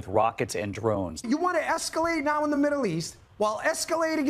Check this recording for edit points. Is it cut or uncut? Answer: cut